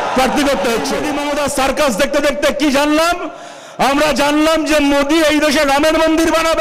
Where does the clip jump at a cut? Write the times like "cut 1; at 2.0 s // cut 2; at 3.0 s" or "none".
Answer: cut 1; at 1.1 s